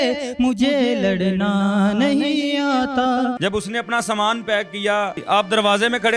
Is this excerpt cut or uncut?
cut